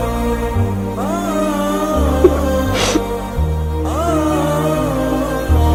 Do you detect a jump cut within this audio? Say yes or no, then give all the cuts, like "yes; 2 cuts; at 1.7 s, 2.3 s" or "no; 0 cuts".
no; 0 cuts